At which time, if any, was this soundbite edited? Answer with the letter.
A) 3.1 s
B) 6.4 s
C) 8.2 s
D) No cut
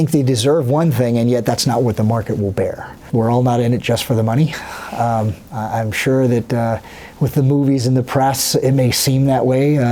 A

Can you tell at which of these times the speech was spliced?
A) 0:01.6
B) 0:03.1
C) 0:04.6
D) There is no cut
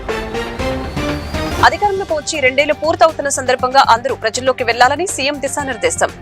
A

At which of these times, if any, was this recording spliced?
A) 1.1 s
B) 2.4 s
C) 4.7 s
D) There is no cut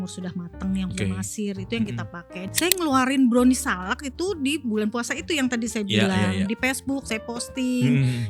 B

